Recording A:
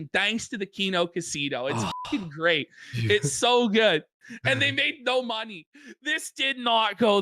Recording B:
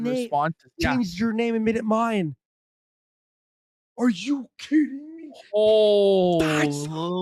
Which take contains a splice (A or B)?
A